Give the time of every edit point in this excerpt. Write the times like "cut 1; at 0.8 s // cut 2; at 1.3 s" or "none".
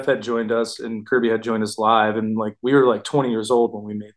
none